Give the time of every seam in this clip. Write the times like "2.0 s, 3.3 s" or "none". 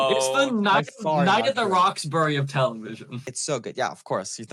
3.3 s